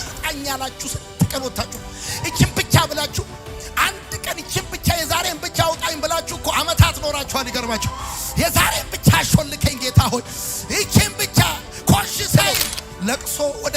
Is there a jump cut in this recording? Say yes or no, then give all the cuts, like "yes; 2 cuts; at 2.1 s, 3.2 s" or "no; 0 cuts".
yes; 1 cut; at 12.4 s